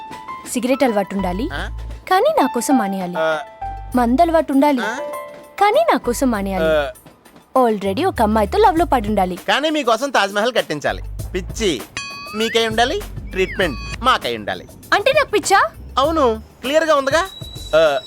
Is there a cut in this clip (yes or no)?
no